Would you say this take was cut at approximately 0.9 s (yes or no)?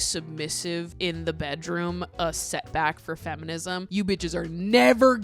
yes